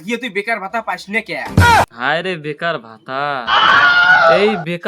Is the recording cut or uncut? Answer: cut